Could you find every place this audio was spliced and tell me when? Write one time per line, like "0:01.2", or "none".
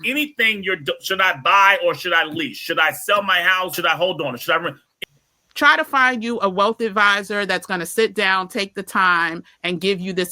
0:03.8
0:04.9